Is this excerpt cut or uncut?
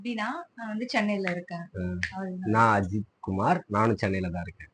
uncut